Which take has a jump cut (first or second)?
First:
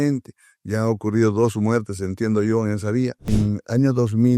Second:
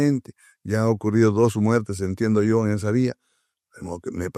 first